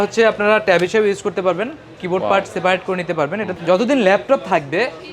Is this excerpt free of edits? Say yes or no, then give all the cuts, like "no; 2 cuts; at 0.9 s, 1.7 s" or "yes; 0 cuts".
no; 1 cut; at 3.5 s